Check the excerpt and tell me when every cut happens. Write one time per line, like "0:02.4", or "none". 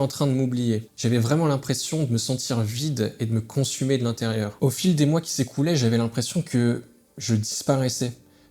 0:00.9
0:04.5